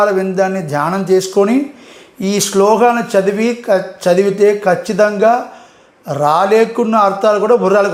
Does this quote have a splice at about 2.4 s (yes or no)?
no